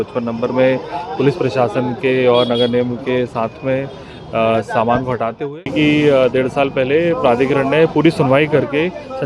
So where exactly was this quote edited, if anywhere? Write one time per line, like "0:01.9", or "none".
0:05.4